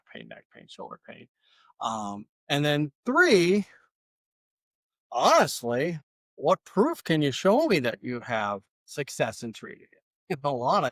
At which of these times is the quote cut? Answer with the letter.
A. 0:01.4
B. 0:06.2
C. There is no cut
C